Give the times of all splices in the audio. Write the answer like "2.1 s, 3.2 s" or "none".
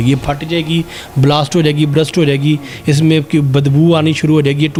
none